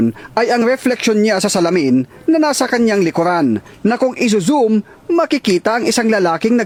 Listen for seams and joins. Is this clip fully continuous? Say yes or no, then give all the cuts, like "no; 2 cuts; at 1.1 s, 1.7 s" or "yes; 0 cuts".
yes; 0 cuts